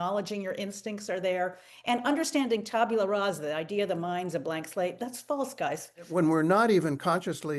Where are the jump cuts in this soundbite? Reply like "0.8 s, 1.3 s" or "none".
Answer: 6.1 s